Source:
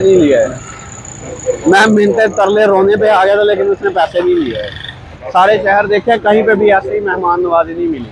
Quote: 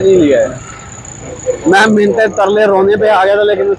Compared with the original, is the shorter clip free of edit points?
yes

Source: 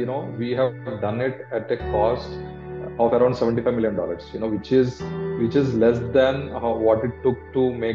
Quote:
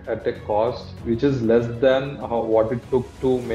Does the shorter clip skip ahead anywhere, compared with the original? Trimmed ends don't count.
yes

